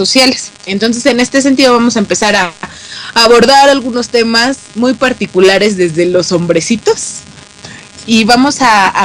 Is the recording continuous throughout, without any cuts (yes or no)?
yes